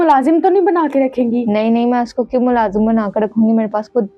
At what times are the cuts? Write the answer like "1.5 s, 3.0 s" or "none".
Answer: none